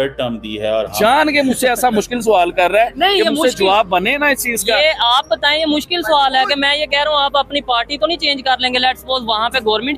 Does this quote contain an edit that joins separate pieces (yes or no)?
yes